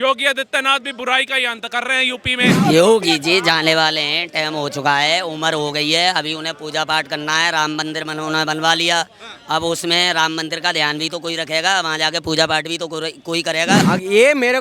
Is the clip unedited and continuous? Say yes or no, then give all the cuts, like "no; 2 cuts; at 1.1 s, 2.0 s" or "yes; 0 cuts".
no; 2 cuts; at 2.6 s, 13.8 s